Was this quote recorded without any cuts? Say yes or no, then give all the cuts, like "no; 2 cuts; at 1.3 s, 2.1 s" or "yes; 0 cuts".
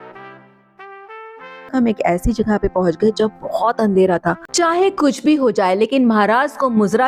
no; 2 cuts; at 1.7 s, 4.4 s